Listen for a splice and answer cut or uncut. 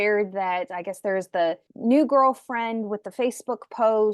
cut